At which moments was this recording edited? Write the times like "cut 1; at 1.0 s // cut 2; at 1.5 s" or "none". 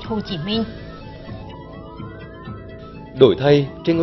cut 1; at 1.1 s // cut 2; at 3.1 s